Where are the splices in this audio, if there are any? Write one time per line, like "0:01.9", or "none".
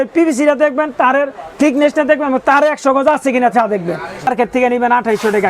0:04.3

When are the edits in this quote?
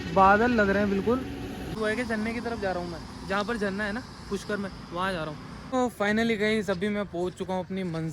0:01.7
0:05.6

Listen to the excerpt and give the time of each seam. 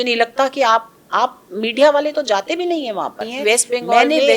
0:03.3

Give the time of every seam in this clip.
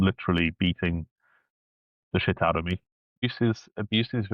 0:03.2

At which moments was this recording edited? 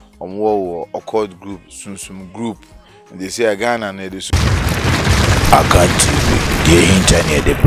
0:04.2

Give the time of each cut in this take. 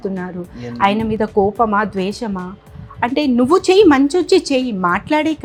none

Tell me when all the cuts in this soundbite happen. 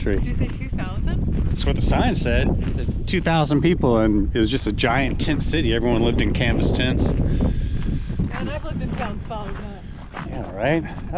none

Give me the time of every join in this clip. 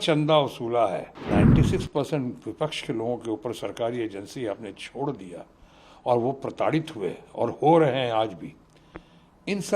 0:01.3

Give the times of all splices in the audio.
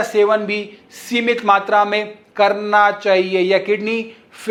none

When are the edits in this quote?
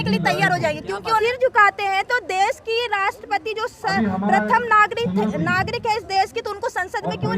0:01.2

